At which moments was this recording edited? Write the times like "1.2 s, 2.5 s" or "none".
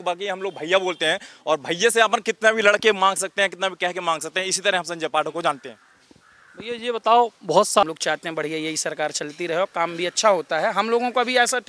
7.8 s